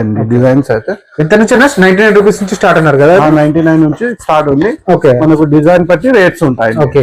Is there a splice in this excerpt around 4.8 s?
no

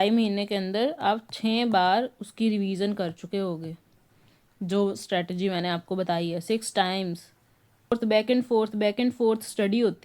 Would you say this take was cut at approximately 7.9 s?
yes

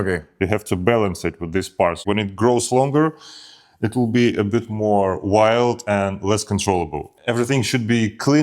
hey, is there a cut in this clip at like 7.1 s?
yes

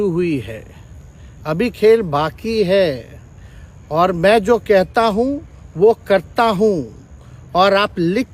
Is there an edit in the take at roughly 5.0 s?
no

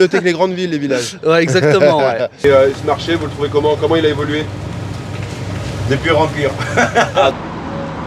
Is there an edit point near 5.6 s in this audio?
no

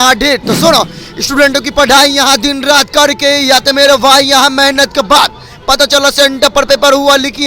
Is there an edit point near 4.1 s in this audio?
no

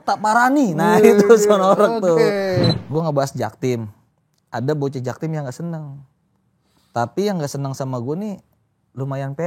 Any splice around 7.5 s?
no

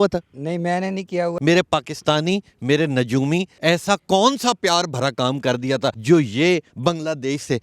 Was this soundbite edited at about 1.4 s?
yes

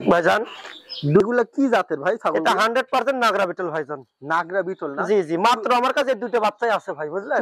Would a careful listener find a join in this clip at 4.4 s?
no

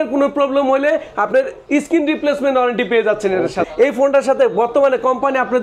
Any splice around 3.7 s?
yes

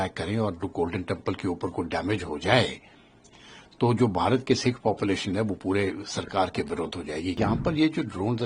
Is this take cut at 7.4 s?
yes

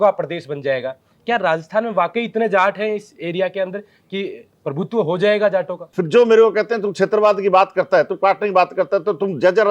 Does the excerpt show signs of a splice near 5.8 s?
yes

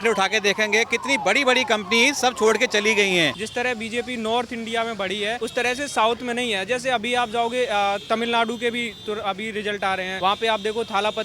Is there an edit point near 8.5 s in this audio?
no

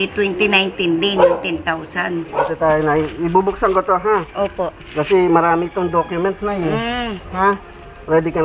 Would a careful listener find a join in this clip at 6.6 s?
no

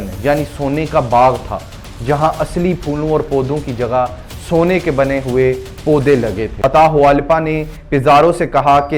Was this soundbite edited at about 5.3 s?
no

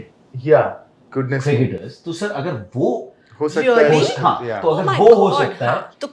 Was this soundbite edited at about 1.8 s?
no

